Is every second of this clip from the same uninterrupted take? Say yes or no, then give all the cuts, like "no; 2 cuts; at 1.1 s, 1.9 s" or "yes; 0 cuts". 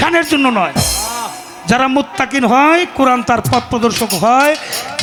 yes; 0 cuts